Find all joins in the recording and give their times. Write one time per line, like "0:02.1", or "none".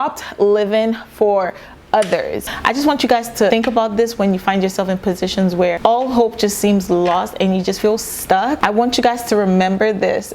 0:02.4
0:03.5
0:05.8
0:08.6